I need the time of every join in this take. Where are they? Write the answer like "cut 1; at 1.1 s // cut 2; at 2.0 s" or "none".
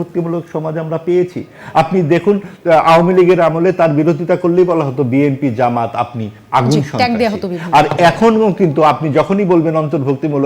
none